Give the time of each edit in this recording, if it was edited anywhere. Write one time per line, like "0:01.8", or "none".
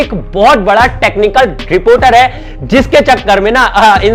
none